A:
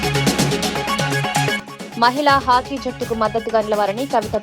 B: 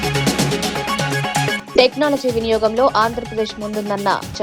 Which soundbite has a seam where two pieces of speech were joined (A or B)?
A